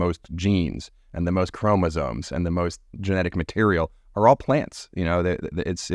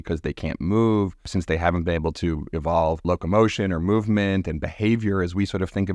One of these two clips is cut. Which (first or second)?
second